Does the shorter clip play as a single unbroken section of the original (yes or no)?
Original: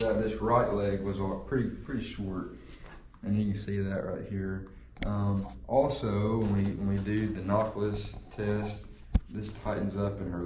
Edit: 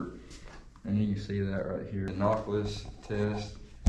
no